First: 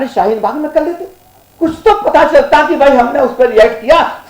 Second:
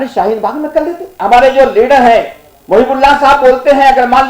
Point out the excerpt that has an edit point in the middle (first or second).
second